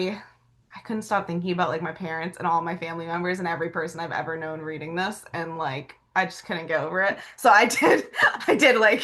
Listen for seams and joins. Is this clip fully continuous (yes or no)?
yes